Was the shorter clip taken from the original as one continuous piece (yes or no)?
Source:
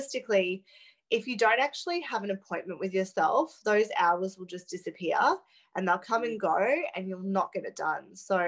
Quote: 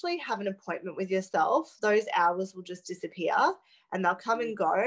yes